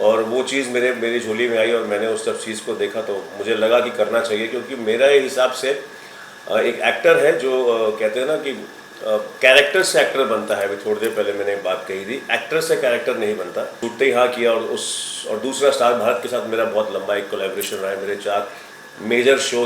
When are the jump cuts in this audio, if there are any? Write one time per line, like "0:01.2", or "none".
0:13.8